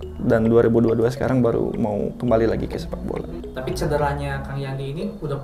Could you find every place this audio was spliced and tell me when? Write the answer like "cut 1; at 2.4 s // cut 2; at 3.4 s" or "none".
cut 1; at 3.4 s